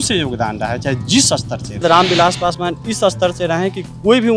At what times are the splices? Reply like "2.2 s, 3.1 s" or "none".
1.8 s